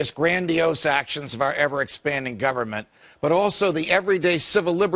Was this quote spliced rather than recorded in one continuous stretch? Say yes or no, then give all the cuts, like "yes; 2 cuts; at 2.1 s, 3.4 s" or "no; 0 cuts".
no; 0 cuts